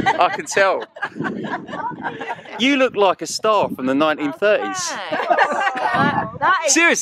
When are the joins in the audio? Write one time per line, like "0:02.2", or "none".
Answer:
0:02.4